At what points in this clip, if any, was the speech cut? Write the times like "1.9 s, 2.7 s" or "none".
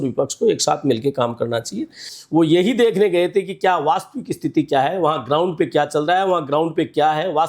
2.1 s